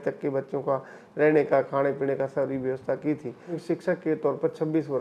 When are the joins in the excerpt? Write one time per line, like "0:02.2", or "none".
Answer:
0:03.6

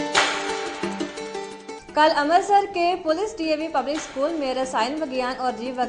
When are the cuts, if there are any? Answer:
none

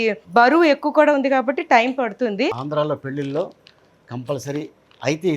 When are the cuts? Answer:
0:02.6

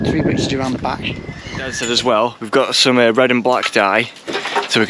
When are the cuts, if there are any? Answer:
0:01.8

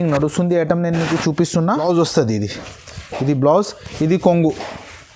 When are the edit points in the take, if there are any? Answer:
0:01.8

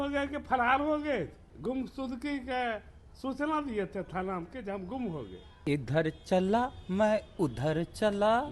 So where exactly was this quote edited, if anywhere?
0:01.4
0:05.4

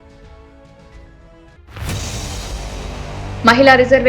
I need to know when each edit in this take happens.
0:01.5
0:03.3

